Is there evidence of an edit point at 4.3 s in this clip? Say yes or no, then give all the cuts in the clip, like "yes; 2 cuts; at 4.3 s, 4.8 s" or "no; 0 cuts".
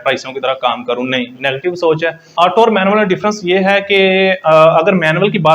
no; 1 cut; at 2.2 s